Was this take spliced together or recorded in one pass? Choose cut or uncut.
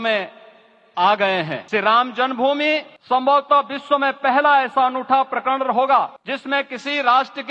cut